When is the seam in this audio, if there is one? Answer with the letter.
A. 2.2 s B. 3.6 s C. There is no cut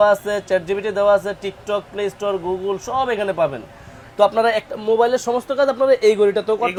C